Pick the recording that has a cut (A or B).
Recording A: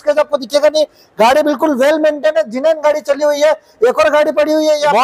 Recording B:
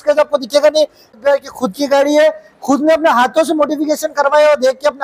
B